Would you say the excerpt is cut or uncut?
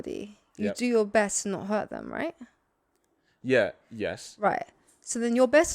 uncut